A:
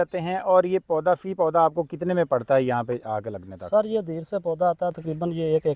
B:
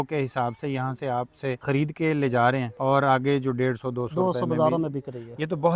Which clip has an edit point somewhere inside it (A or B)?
B